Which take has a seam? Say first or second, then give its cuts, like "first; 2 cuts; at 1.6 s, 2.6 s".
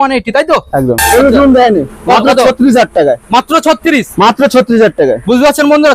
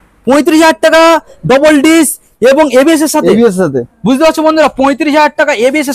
first; 1 cut; at 1.0 s